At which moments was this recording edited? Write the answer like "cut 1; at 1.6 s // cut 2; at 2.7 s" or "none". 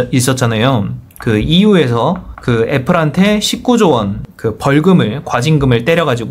cut 1; at 2.3 s